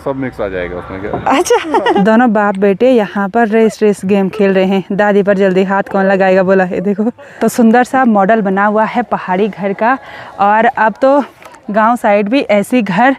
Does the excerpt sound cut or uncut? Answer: cut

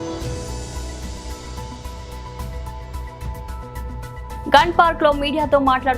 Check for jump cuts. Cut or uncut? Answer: uncut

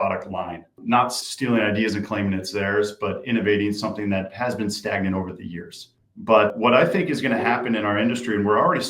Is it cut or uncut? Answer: cut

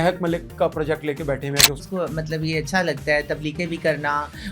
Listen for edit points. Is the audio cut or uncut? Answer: cut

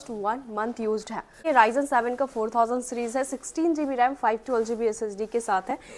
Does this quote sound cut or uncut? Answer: cut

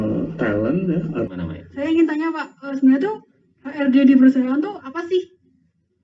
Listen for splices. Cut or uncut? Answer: cut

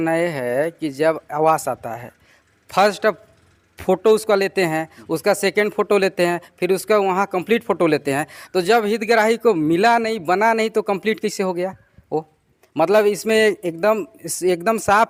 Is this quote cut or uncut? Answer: uncut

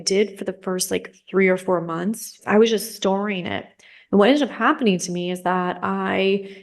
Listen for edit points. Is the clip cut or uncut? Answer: cut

